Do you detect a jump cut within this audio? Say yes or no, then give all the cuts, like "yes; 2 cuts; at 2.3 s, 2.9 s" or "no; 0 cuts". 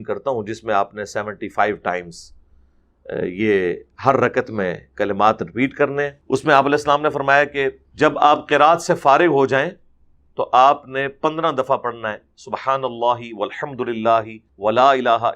yes; 3 cuts; at 6.2 s, 7.8 s, 14.4 s